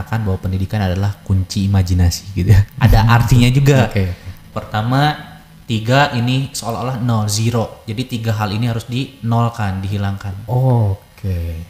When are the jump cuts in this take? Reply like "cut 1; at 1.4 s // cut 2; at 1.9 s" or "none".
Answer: cut 1; at 2.7 s